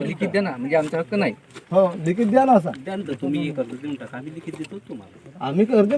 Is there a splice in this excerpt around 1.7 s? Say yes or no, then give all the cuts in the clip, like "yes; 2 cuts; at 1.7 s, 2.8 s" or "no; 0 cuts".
no; 0 cuts